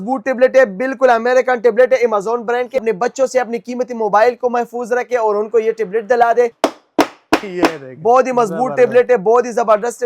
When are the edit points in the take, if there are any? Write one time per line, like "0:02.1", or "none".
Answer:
0:02.8
0:06.5